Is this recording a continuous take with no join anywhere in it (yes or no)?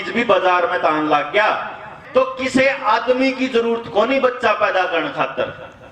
no